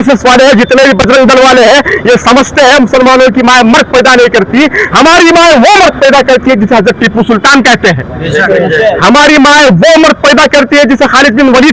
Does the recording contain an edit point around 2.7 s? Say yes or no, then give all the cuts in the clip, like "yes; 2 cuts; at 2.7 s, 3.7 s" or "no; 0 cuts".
no; 0 cuts